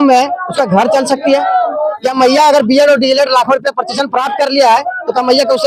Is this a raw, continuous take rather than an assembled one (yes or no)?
yes